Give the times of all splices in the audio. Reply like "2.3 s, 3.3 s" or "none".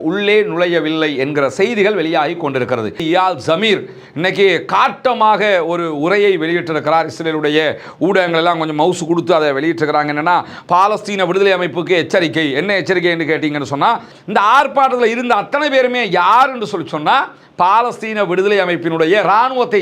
3.0 s, 14.1 s